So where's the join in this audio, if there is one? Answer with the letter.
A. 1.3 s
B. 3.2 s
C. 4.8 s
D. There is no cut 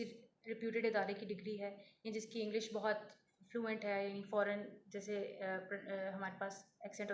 D